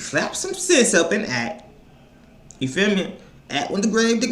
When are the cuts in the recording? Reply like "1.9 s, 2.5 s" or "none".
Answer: none